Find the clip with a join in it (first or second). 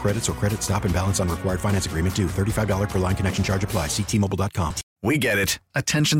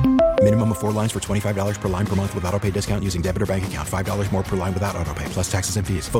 first